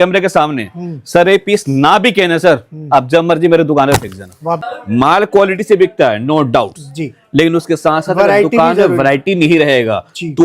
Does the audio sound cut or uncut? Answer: cut